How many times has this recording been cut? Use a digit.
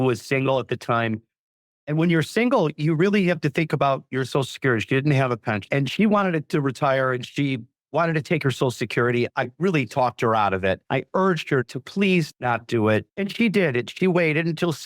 0